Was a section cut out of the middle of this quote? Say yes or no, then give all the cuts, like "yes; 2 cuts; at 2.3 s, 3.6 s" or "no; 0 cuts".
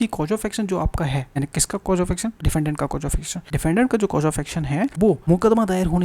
yes; 4 cuts; at 1.3 s, 2.4 s, 3.3 s, 5.1 s